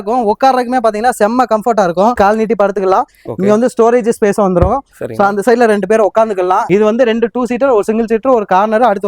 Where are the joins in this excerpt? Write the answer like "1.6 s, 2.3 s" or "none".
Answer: 2.2 s, 6.7 s